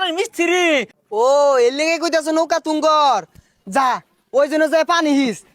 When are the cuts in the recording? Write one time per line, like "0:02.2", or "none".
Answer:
0:00.9